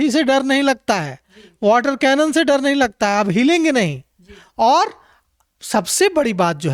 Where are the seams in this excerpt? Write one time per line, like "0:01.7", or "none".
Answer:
none

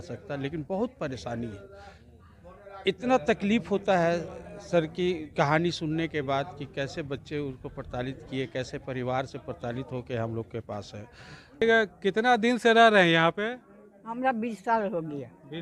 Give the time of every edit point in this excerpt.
0:11.6

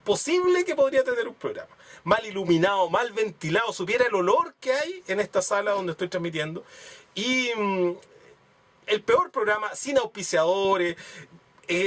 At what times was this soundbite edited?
none

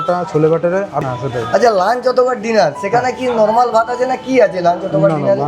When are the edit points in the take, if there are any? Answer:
0:01.0

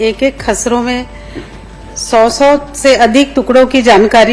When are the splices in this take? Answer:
none

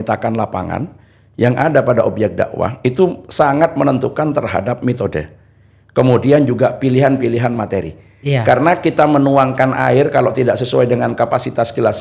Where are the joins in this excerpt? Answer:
none

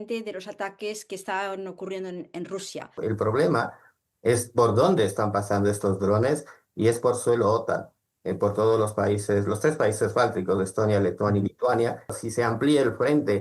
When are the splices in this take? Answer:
0:03.0
0:12.2

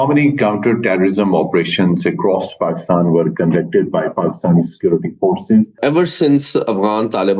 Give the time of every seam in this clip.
0:05.7

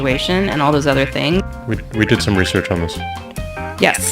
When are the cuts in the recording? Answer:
0:01.6

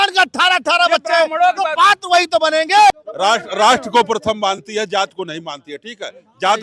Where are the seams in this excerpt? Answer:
0:02.9

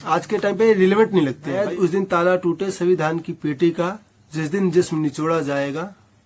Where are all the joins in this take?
0:01.5

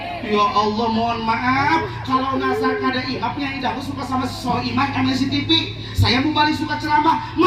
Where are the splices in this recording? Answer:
none

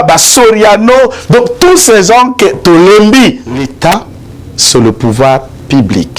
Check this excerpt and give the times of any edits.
0:03.7

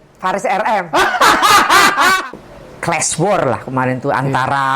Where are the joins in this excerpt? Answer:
0:02.2

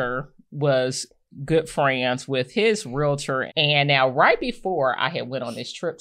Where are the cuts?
0:03.5

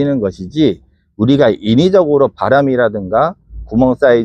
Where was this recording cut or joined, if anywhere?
none

